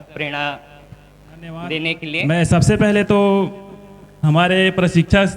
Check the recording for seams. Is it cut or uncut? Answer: cut